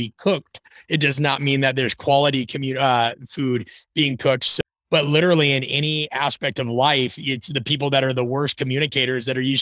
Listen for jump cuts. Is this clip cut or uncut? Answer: cut